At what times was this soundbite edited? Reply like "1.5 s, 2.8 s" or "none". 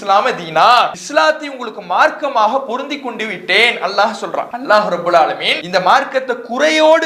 1.0 s, 4.5 s, 5.5 s